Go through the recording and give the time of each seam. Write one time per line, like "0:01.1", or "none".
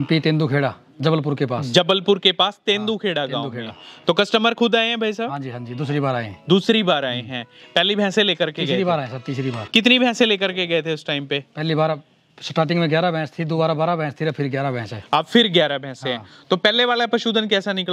none